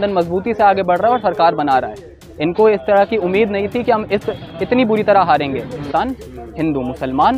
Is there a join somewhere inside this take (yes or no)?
yes